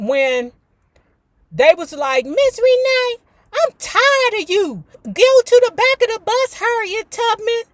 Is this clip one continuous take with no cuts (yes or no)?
no